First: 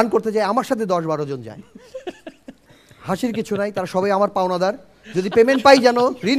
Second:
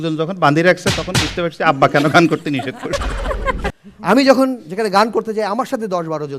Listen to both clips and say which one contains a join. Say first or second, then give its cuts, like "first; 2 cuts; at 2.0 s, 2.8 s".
second; 1 cut; at 3.8 s